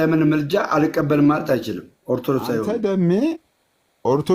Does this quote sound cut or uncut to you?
cut